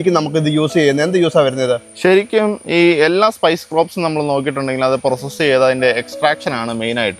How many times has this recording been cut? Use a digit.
0